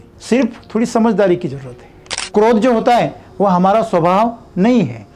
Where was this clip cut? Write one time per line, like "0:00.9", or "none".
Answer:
0:02.3

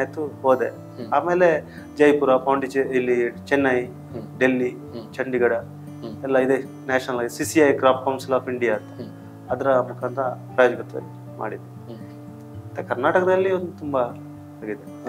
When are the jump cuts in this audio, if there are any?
none

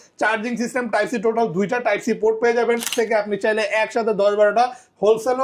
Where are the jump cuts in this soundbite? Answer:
0:02.9

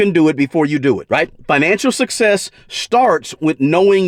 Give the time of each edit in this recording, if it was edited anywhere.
none

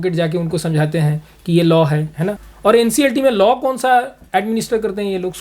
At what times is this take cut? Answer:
0:02.5

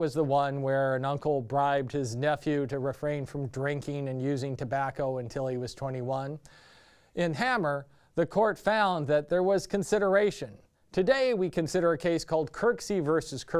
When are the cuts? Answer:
0:04.5

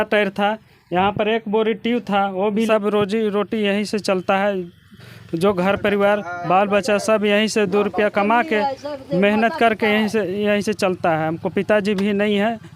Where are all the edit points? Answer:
0:02.6

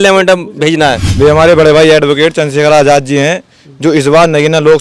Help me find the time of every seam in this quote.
0:01.0

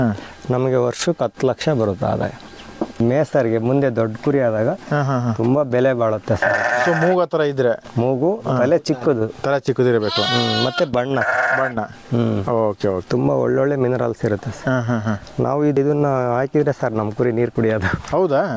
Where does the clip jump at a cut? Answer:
0:02.9
0:13.1
0:15.8

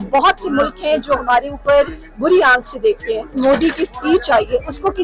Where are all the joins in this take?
0:03.3

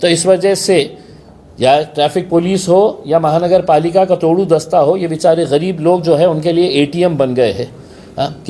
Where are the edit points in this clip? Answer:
none

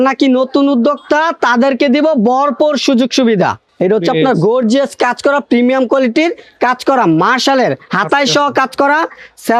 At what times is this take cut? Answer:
none

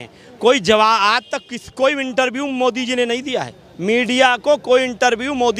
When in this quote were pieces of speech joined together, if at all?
none

